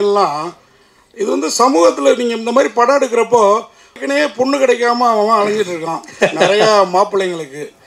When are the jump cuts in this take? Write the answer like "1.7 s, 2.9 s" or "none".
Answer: 4.0 s

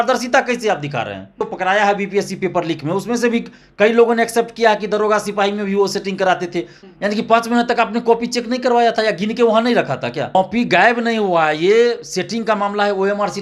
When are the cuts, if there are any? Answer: 1.5 s, 6.7 s, 10.3 s

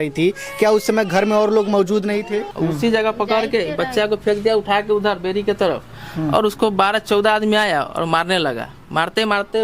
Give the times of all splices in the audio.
2.5 s

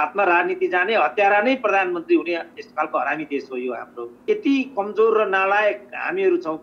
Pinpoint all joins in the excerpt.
4.2 s

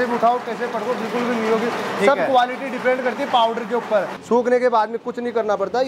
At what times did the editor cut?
4.1 s

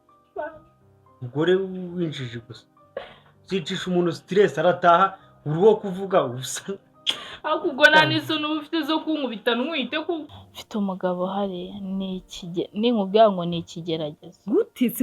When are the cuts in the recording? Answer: 10.3 s

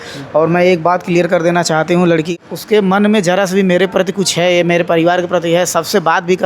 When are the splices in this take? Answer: 2.3 s

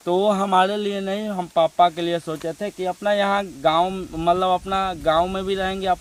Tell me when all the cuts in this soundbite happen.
none

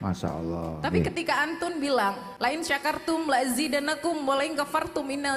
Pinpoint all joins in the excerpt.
2.3 s

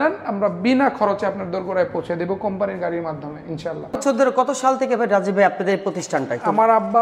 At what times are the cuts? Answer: 4.0 s

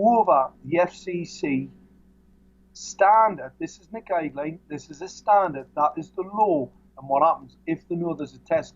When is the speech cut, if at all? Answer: 6.9 s

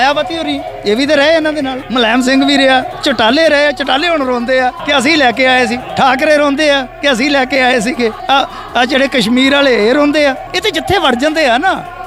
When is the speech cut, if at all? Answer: 1.8 s, 2.9 s, 4.8 s, 5.8 s, 8.2 s, 10.5 s

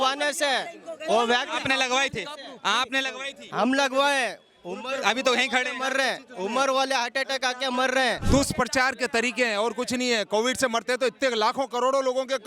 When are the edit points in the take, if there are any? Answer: 8.2 s

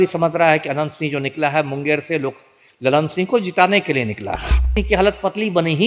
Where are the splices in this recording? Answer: 4.8 s

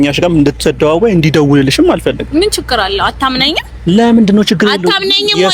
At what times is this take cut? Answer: none

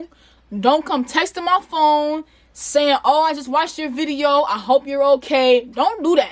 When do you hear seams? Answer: none

